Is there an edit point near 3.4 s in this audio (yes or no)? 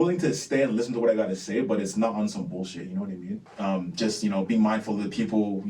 yes